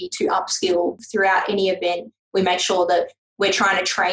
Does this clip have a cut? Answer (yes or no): yes